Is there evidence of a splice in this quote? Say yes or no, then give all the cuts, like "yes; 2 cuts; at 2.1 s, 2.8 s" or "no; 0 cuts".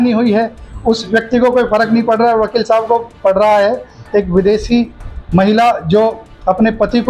no; 0 cuts